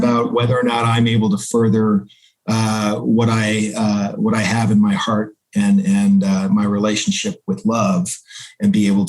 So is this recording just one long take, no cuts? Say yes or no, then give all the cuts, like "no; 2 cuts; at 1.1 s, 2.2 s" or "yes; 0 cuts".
yes; 0 cuts